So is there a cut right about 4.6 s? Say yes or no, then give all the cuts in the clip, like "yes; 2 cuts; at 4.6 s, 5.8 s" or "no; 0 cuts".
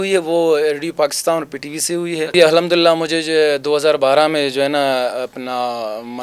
no; 1 cut; at 2.3 s